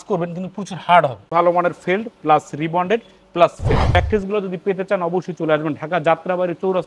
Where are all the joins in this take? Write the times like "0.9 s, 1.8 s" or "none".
1.2 s, 3.9 s